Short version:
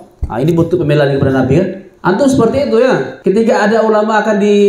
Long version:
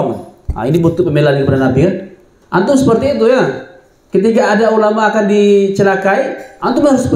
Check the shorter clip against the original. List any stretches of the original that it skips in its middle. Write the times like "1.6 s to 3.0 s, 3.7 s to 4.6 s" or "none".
2.1 s to 2.3 s, 3.6 s to 4.0 s